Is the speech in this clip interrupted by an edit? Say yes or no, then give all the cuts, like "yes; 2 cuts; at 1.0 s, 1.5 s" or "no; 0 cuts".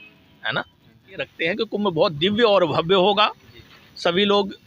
yes; 1 cut; at 1.3 s